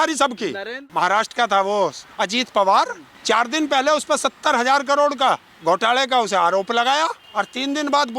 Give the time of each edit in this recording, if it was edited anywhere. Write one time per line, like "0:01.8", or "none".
0:00.9
0:02.1
0:03.1
0:05.5
0:07.2